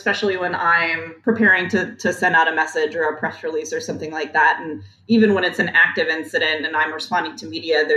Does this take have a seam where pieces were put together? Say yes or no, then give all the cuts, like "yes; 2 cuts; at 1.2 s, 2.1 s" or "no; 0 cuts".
yes; 1 cut; at 1.0 s